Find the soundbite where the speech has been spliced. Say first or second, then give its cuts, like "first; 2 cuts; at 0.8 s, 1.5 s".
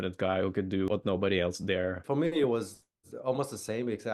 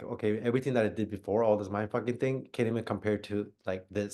first; 2 cuts; at 0.9 s, 2.0 s